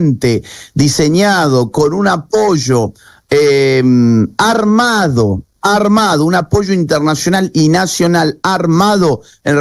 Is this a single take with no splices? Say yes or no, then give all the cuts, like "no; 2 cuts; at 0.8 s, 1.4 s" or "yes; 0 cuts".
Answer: yes; 0 cuts